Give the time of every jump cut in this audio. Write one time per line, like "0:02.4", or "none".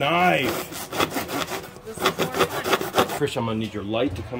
0:03.1